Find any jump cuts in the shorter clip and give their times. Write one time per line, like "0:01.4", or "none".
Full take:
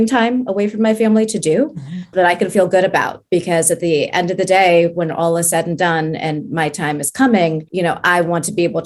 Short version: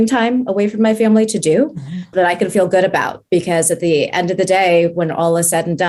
none